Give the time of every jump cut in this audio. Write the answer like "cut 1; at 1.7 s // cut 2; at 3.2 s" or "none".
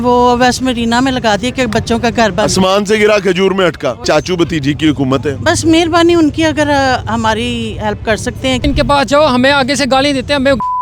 cut 1; at 4.0 s // cut 2; at 8.6 s